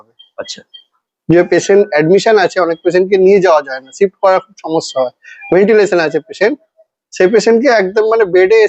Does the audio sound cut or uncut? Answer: uncut